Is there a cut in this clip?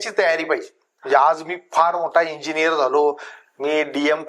no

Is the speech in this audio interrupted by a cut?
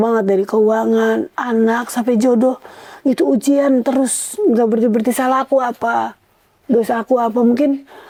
no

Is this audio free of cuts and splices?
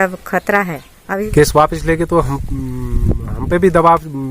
no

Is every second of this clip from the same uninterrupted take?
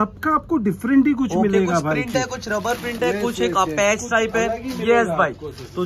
yes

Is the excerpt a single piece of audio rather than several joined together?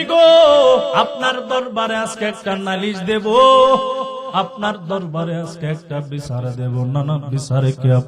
no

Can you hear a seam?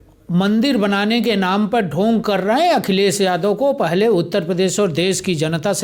no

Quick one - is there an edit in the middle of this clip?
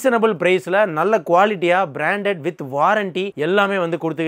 no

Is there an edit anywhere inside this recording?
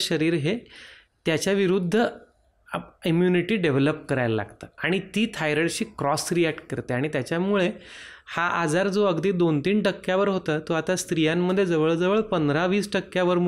no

